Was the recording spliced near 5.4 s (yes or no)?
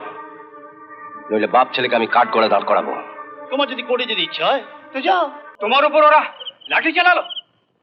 yes